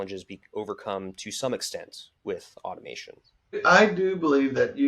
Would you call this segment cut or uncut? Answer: cut